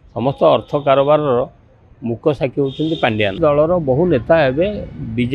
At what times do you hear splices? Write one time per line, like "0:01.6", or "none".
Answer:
0:03.4